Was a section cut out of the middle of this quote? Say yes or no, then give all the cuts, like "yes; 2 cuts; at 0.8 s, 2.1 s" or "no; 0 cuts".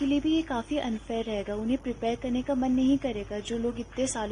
no; 0 cuts